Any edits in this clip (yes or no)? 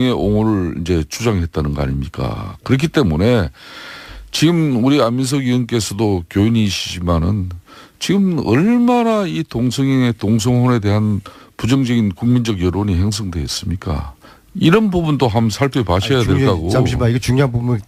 no